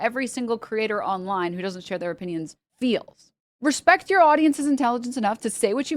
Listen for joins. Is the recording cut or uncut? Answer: cut